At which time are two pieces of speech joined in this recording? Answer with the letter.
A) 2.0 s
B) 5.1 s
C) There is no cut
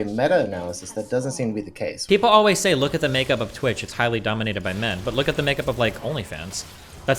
A